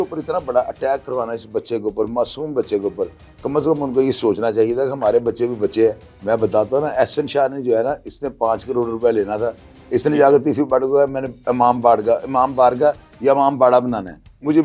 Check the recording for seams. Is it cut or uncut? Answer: cut